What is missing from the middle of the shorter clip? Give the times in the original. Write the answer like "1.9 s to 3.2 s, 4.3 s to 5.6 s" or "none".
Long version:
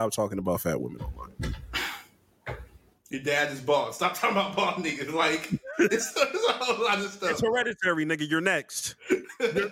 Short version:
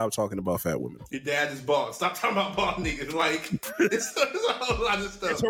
1.0 s to 3.0 s